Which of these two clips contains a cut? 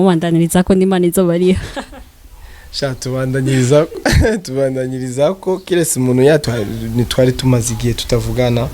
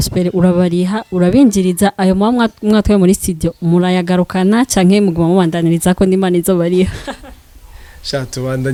first; 1 cut; at 6.4 s

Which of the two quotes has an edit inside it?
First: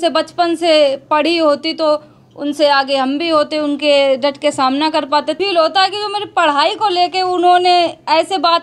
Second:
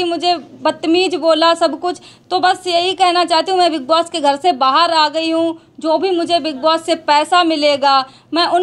first; 1 cut; at 5.4 s

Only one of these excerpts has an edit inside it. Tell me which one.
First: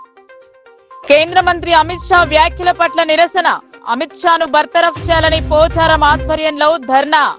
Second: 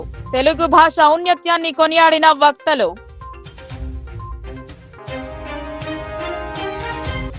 first; 1 cut; at 1.0 s

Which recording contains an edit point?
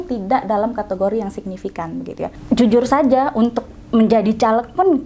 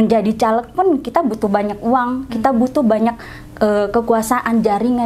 first; 1 cut; at 2.3 s

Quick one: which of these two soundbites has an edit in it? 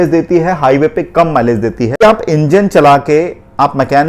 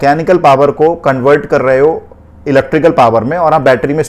first; 1 cut; at 2.0 s

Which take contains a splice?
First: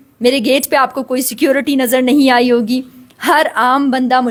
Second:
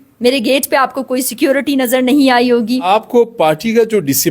second; 1 cut; at 2.9 s

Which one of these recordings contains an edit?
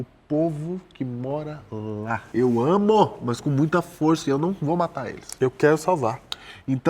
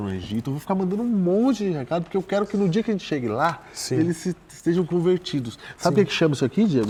first; 1 cut; at 2.3 s

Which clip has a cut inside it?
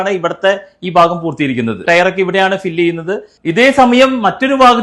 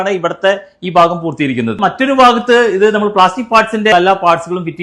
second; 2 cuts; at 1.8 s, 3.9 s

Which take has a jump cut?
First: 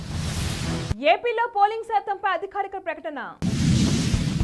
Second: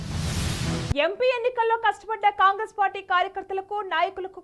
second; 1 cut; at 0.9 s

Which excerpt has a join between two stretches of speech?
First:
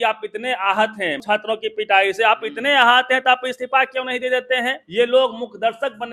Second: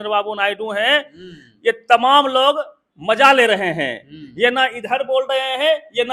first; 2 cuts; at 1.2 s, 4.8 s

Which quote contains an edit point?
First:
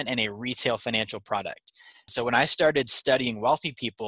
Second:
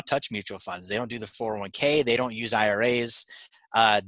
first; 1 cut; at 2.0 s

